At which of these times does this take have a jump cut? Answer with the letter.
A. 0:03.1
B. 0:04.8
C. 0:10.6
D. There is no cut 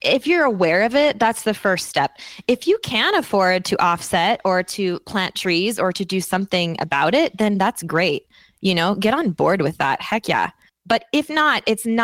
C